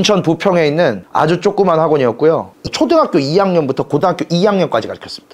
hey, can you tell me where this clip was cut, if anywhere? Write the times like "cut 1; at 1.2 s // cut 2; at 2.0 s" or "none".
cut 1; at 2.6 s